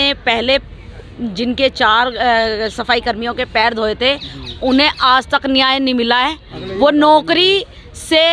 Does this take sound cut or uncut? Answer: uncut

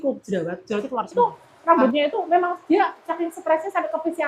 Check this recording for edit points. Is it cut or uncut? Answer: cut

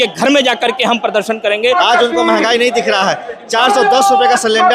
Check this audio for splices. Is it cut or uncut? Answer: cut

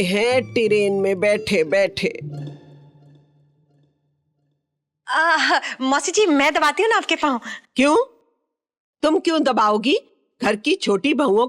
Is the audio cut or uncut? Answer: uncut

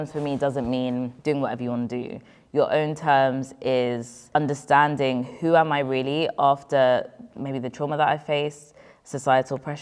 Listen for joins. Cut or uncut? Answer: cut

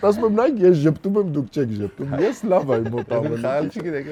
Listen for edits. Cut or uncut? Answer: uncut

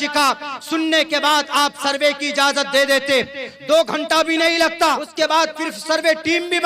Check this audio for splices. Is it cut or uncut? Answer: cut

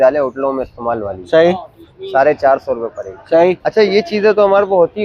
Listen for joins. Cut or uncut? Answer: uncut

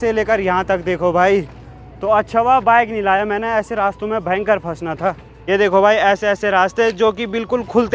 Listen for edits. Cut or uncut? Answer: uncut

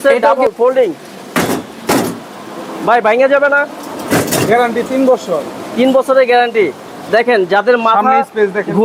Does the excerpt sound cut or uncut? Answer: uncut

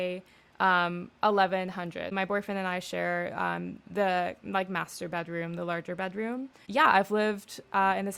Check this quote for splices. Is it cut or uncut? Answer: cut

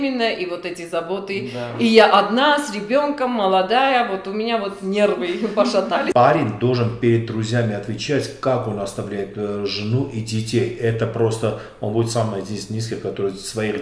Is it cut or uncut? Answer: cut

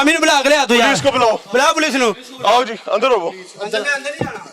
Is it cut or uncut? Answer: uncut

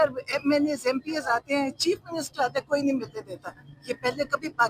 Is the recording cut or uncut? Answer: uncut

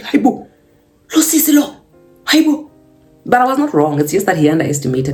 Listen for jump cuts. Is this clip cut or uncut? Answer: uncut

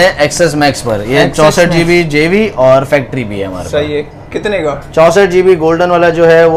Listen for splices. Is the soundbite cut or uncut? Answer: uncut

